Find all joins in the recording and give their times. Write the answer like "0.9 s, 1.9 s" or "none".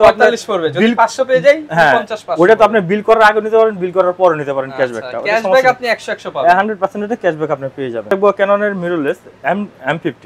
none